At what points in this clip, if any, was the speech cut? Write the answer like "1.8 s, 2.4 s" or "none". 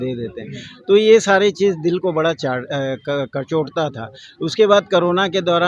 none